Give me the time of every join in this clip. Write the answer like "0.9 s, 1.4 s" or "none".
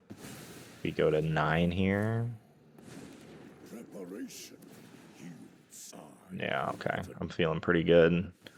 none